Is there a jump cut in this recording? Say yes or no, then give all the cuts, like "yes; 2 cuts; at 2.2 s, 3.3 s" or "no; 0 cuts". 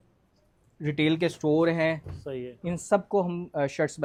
no; 0 cuts